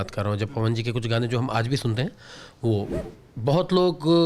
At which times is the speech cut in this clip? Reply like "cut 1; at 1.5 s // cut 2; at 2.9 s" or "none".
cut 1; at 3.1 s

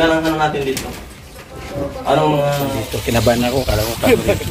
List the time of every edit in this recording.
cut 1; at 2.9 s

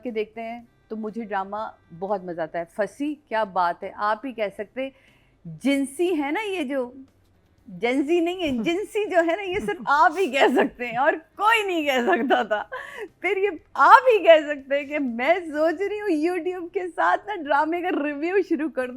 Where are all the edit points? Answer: none

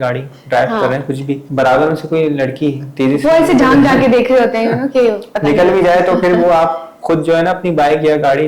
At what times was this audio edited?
cut 1; at 1.5 s

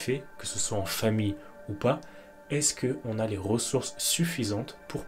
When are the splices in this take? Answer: none

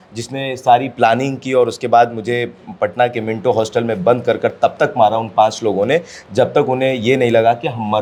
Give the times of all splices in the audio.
none

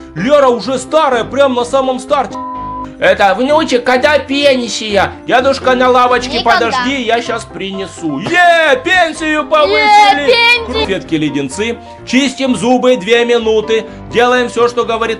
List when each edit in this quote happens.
cut 1; at 2.6 s // cut 2; at 10.8 s

